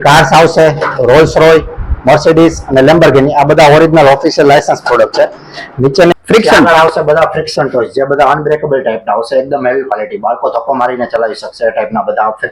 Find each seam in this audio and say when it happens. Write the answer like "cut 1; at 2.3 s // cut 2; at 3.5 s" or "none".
cut 1; at 6.1 s